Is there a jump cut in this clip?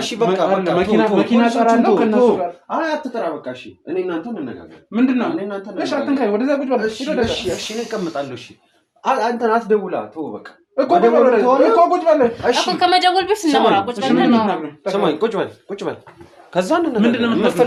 no; 0 cuts

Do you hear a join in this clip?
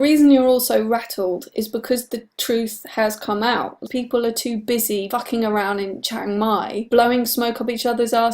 yes; 1 cut; at 3.7 s

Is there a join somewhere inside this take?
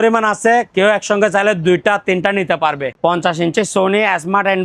yes; 1 cut; at 2.9 s

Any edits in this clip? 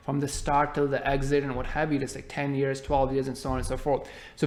no; 0 cuts

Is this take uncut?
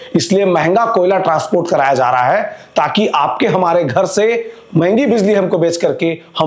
yes; 0 cuts

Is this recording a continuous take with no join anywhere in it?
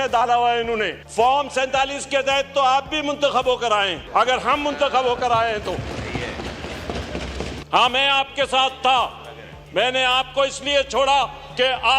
no; 3 cuts; at 1.0 s, 4.0 s, 7.6 s

